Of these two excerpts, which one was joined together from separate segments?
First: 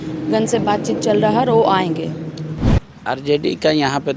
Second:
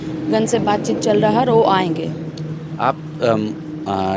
first; 1 cut; at 2.6 s

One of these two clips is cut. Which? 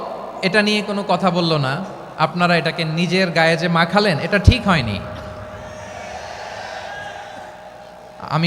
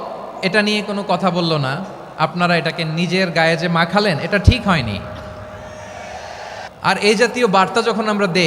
second; 1 cut; at 6.6 s

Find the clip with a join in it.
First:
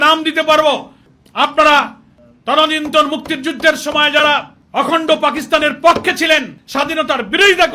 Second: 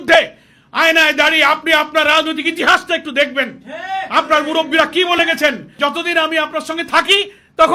second; 1 cut; at 5.7 s

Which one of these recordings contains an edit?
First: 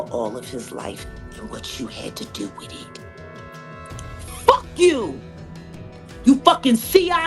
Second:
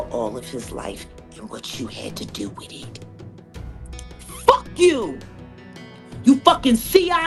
first; 2 cuts; at 2.7 s, 4.0 s

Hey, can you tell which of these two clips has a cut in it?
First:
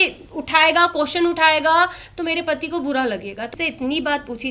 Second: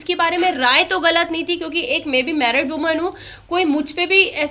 first; 1 cut; at 3.5 s

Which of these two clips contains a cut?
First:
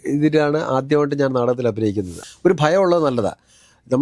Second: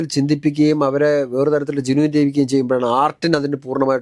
first; 1 cut; at 2.2 s

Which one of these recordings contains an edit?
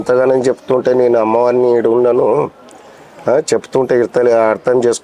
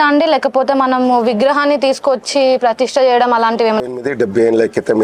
second; 1 cut; at 3.9 s

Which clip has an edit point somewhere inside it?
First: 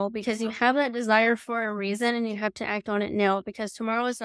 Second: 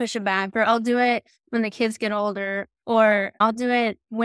second; 2 cuts; at 2.7 s, 3.4 s

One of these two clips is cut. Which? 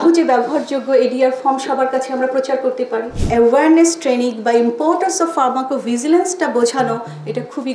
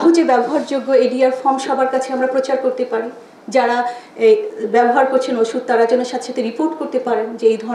first; 1 cut; at 3.3 s

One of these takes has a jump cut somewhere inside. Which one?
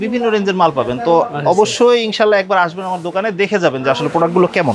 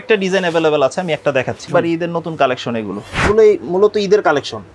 second; 2 cuts; at 1.7 s, 3.2 s

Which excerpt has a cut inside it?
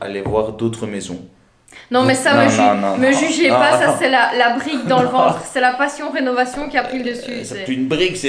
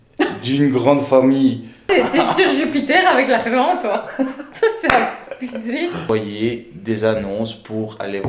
second; 2 cuts; at 1.8 s, 6.0 s

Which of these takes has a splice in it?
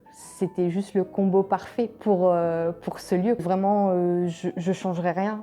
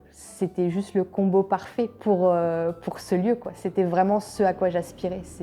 first; 1 cut; at 3.4 s

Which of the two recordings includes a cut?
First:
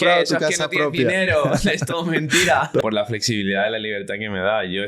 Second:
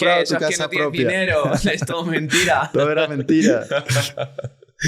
first; 1 cut; at 2.8 s

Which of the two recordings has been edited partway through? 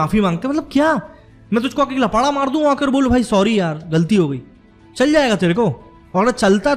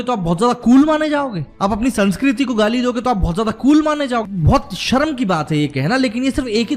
second; 2 cuts; at 1.4 s, 4.2 s

